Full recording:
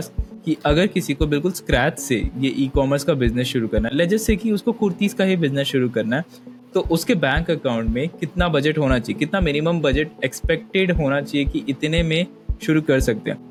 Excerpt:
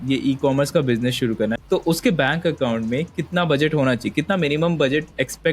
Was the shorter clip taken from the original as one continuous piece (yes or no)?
no